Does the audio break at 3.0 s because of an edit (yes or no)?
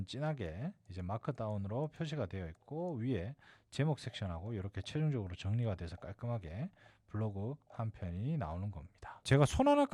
no